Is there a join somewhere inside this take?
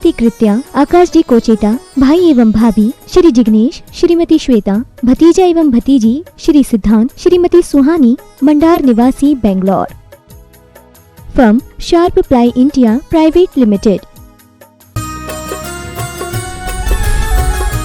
yes; 1 cut; at 14.9 s

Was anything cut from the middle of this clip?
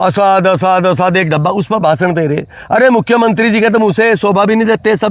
no; 0 cuts

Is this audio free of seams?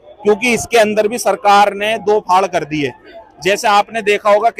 yes; 0 cuts

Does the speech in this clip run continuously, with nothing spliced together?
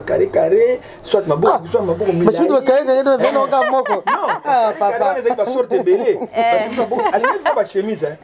yes; 0 cuts

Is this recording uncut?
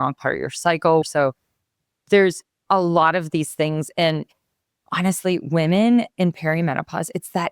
no; 1 cut; at 1.0 s

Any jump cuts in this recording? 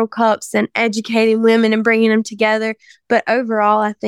no; 0 cuts

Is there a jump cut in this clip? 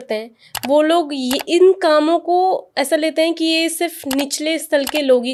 no; 0 cuts

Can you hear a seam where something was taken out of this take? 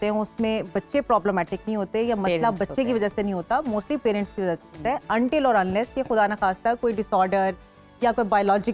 no; 0 cuts

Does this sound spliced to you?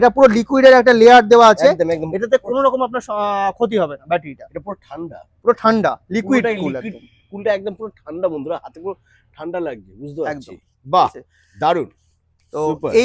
no; 0 cuts

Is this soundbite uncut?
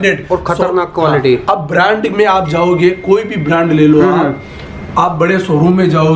yes; 0 cuts

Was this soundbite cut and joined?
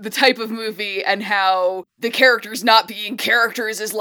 yes; 1 cut; at 1.9 s

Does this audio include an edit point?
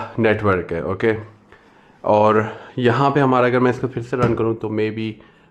no; 0 cuts

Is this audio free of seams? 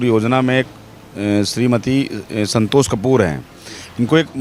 yes; 0 cuts

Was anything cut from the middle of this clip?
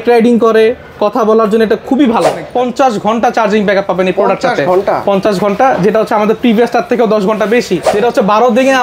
yes; 2 cuts; at 2.4 s, 7.8 s

